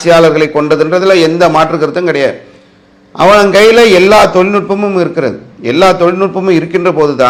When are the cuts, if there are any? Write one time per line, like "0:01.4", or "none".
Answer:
none